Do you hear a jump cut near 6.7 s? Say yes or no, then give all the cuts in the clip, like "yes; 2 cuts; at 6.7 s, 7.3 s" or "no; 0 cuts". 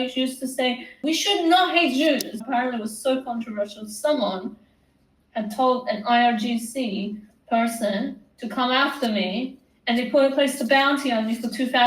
no; 2 cuts; at 0.9 s, 2.3 s